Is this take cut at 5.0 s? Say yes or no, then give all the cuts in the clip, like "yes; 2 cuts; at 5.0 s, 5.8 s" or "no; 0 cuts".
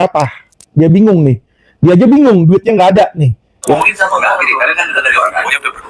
no; 2 cuts; at 1.3 s, 3.8 s